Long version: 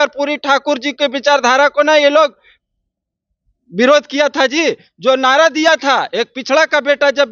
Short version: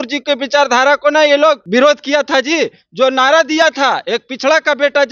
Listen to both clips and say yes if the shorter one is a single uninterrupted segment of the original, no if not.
no